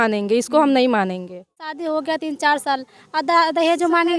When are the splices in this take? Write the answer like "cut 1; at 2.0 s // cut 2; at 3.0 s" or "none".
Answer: cut 1; at 1.8 s